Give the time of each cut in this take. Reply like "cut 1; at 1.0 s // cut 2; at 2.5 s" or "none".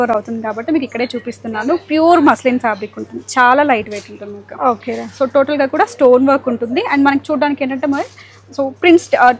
none